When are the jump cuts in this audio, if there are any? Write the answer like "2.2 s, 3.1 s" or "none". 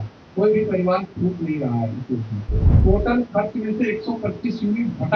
2.7 s